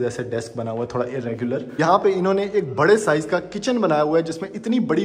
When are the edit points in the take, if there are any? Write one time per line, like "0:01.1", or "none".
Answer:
0:01.7